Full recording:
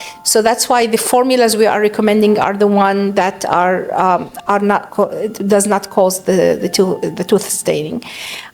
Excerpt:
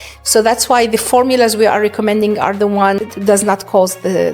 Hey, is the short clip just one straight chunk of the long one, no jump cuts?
no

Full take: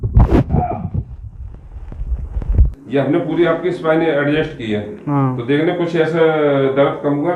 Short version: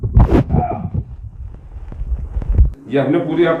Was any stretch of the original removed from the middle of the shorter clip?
no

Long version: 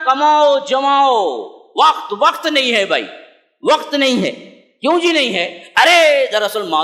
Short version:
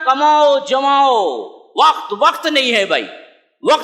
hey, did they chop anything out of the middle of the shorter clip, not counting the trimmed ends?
no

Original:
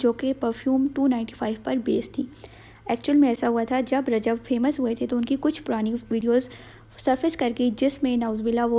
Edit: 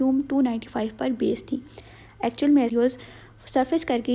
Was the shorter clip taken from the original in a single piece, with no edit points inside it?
no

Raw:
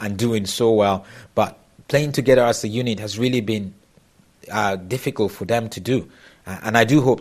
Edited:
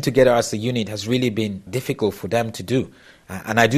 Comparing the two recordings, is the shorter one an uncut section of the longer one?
no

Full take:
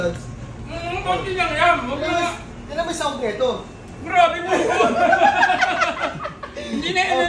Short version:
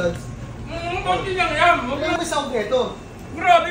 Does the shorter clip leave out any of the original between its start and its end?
yes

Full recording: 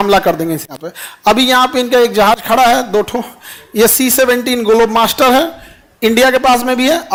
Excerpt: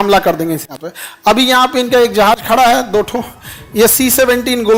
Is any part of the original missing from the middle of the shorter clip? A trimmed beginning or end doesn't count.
no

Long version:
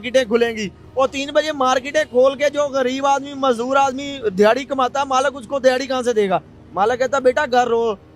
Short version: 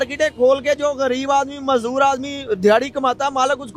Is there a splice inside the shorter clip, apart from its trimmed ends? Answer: no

